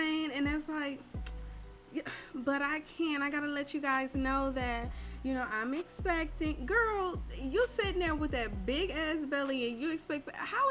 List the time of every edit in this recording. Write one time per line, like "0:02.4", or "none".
none